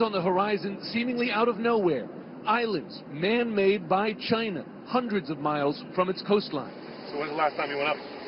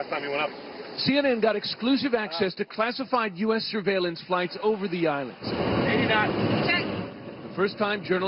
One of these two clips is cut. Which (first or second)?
first